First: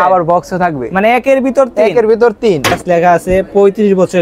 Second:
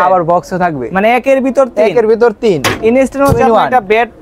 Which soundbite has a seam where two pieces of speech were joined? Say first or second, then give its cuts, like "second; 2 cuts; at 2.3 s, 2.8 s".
first; 1 cut; at 2.8 s